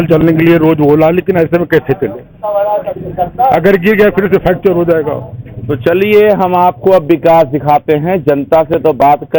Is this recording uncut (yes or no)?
yes